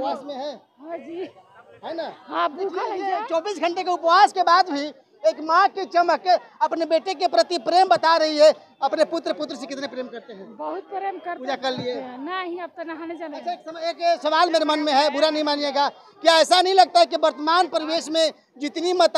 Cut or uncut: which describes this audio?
uncut